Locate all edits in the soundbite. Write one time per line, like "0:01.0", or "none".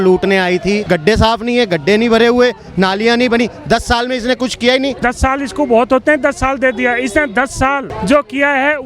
0:00.8
0:05.0
0:07.9